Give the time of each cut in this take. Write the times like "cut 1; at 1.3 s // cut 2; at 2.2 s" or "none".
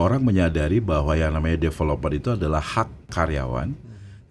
cut 1; at 3.1 s